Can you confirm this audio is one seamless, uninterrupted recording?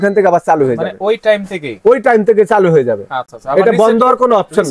yes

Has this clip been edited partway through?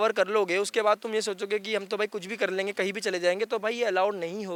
no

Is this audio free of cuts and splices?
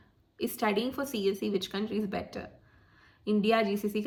yes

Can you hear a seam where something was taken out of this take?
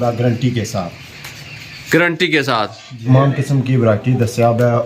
yes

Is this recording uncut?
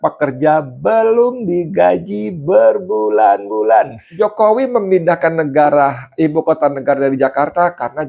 no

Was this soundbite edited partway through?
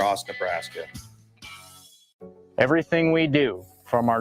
yes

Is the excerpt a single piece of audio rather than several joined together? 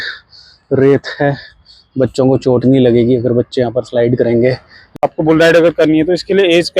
no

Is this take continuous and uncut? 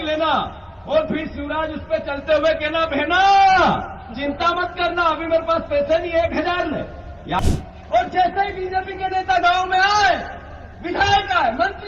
no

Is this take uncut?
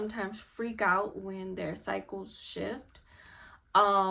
yes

